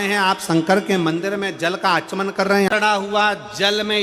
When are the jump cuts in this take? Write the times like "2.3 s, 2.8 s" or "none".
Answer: 2.7 s